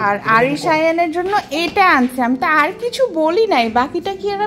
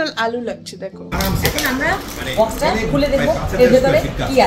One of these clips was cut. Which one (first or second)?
second